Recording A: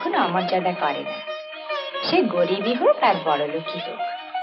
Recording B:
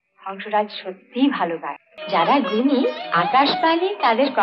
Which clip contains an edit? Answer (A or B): B